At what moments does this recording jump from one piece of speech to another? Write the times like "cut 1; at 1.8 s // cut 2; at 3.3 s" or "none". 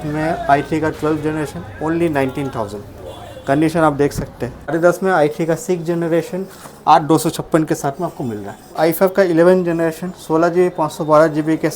cut 1; at 4.7 s // cut 2; at 8.8 s